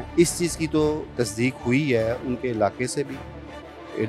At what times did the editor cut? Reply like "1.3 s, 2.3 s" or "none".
1.1 s